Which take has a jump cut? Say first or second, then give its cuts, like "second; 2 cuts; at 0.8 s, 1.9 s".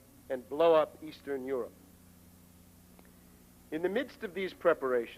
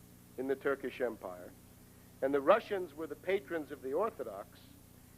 second; 1 cut; at 3.1 s